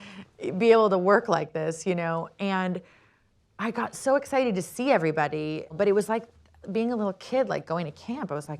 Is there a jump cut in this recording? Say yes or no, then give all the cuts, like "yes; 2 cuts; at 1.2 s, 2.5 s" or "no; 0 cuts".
yes; 1 cut; at 5.7 s